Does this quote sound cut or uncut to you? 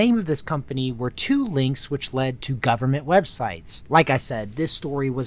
cut